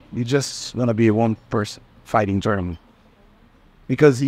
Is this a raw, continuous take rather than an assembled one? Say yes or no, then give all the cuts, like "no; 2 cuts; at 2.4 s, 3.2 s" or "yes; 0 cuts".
yes; 0 cuts